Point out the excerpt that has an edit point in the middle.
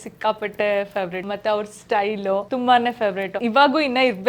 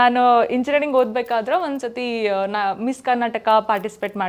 first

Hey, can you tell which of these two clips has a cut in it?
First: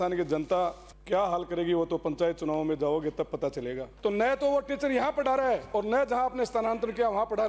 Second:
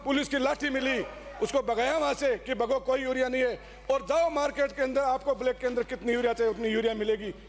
first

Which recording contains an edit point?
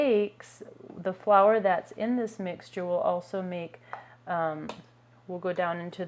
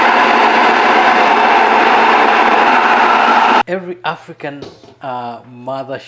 second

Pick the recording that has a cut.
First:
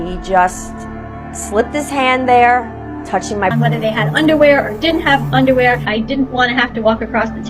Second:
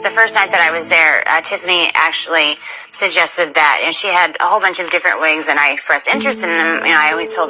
first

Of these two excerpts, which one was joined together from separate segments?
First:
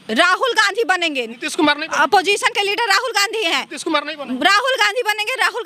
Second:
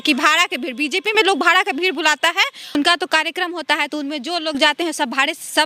second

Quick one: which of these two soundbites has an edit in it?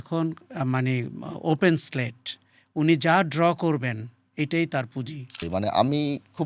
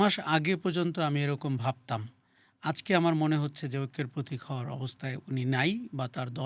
first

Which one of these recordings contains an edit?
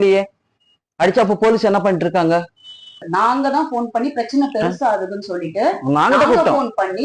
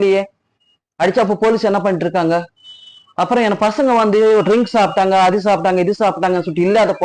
first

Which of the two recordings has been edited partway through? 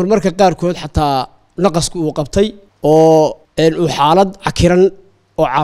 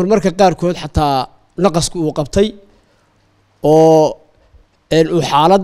first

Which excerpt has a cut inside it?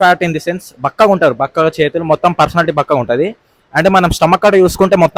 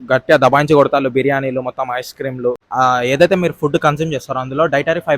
second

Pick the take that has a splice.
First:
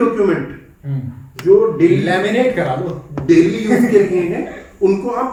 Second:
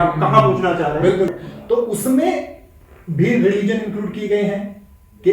second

